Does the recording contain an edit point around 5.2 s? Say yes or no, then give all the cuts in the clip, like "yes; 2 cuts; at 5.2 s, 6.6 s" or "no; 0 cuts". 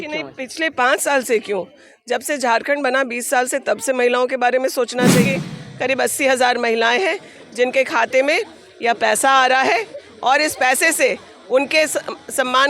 yes; 1 cut; at 5.2 s